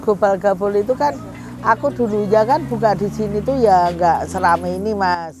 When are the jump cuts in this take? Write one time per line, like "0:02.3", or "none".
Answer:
none